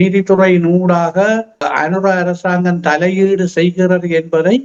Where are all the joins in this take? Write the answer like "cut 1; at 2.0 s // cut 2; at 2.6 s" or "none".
none

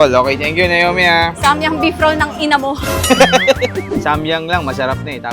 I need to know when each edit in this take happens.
cut 1; at 4.0 s

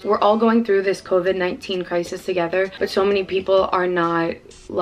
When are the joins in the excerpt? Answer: cut 1; at 2.7 s

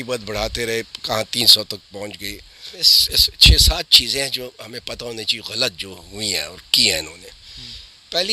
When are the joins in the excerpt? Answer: cut 1; at 2.9 s

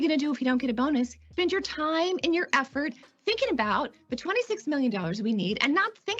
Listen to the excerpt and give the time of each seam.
cut 1; at 1.2 s

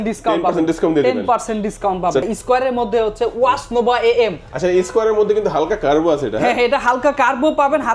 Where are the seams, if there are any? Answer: cut 1; at 2.2 s

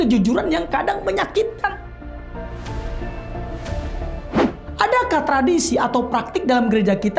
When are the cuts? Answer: none

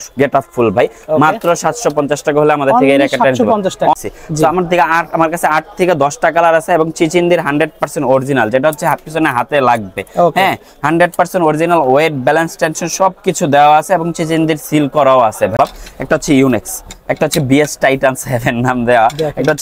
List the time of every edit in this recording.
cut 1; at 3.9 s // cut 2; at 15.5 s

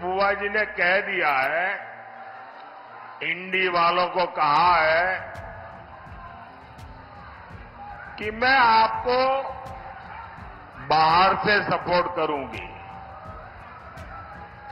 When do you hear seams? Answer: none

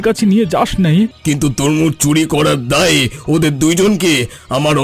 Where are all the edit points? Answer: cut 1; at 1.2 s

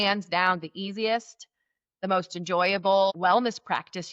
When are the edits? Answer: cut 1; at 3.1 s

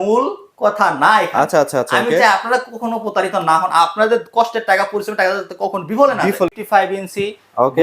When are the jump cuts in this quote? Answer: cut 1; at 6.5 s

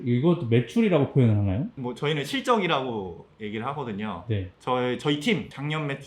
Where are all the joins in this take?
none

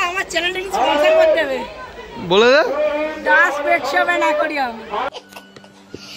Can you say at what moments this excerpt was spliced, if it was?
cut 1; at 5.1 s

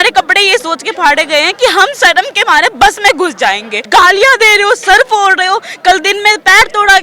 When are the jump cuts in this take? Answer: cut 1; at 3.7 s

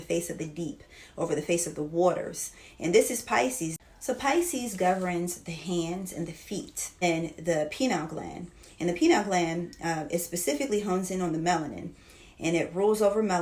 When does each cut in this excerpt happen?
cut 1; at 3.7 s // cut 2; at 7.0 s

